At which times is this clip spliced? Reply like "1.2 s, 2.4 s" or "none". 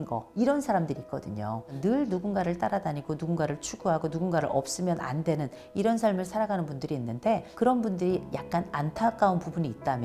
1.7 s

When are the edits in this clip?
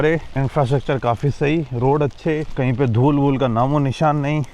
none

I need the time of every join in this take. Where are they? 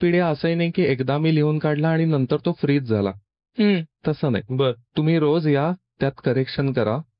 none

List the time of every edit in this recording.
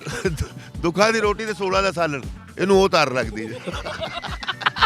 none

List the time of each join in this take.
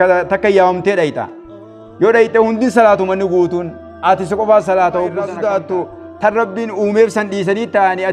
5.3 s

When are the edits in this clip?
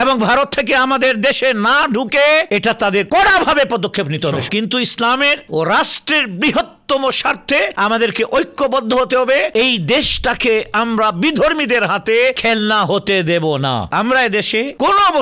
4.5 s, 13.9 s

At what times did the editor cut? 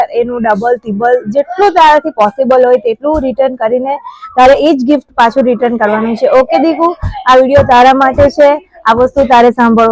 none

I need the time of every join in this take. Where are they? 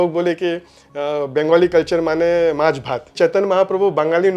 3.1 s

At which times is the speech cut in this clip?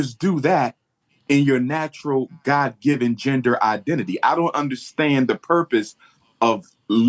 none

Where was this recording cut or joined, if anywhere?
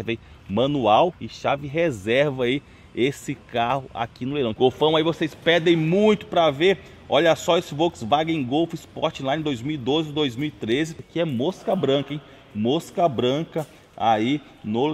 4.5 s, 11.0 s

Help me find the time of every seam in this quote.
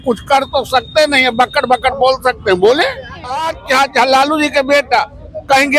3.5 s

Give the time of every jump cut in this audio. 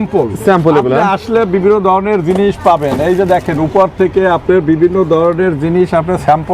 none

